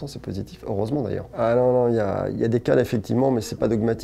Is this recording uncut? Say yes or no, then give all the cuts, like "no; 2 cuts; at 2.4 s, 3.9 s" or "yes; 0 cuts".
yes; 0 cuts